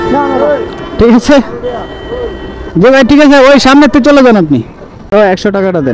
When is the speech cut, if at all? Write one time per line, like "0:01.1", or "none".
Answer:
0:04.9